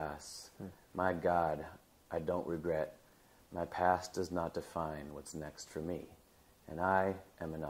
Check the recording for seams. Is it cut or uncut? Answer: uncut